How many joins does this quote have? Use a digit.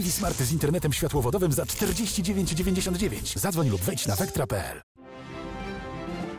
1